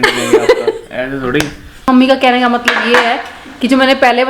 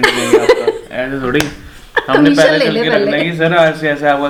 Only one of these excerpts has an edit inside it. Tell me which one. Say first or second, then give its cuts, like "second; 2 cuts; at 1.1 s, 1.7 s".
first; 1 cut; at 1.9 s